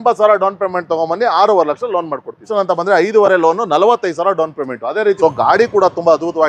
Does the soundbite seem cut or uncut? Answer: cut